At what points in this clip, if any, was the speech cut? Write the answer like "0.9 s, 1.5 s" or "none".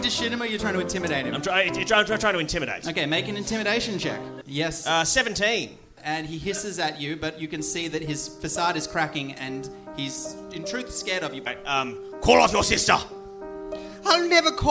4.4 s, 6.0 s, 11.4 s